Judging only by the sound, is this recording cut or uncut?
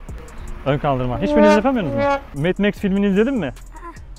cut